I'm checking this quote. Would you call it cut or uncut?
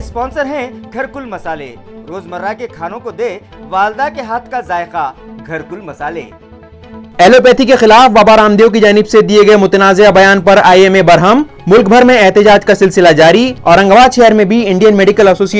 uncut